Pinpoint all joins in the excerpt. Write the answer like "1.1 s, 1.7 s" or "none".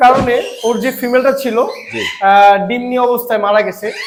none